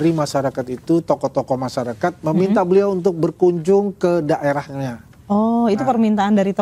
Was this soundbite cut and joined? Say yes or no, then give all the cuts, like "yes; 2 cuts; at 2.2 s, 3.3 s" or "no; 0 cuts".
no; 0 cuts